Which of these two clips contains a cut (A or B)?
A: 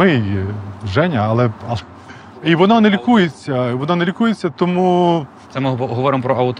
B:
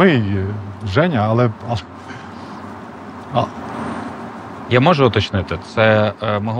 A